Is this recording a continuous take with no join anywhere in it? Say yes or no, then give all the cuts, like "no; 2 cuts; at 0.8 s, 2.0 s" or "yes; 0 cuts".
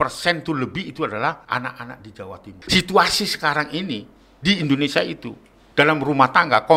no; 2 cuts; at 1.4 s, 2.5 s